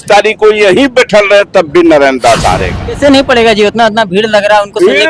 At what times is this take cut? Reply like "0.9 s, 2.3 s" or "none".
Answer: 2.8 s